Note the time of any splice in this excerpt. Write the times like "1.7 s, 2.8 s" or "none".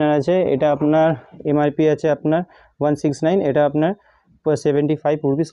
none